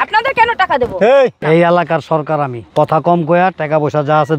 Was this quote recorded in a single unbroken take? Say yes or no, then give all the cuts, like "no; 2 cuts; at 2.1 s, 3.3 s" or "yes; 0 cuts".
no; 2 cuts; at 1.4 s, 2.6 s